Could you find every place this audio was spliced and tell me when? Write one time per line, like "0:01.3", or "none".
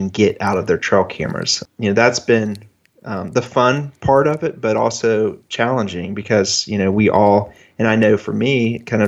0:01.6